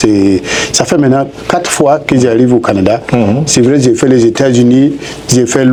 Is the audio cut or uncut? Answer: uncut